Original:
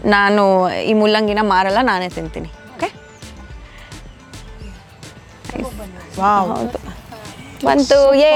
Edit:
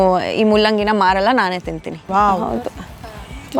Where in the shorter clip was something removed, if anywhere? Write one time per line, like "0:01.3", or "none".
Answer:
0:01.9